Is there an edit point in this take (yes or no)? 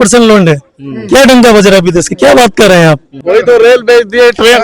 yes